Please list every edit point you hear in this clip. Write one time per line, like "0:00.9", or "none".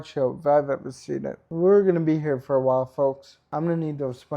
0:01.4
0:03.5